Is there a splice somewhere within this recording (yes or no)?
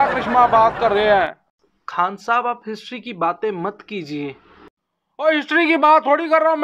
no